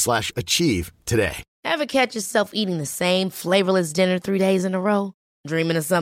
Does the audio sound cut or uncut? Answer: cut